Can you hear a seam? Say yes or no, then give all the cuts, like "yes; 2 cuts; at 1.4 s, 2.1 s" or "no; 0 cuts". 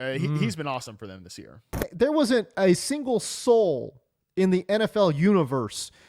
yes; 1 cut; at 1.8 s